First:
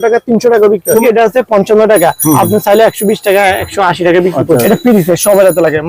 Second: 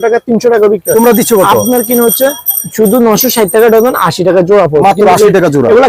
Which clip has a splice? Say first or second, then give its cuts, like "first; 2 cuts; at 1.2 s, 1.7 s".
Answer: first; 2 cuts; at 1.0 s, 4.6 s